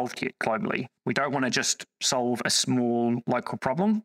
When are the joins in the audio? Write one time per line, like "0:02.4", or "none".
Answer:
0:00.9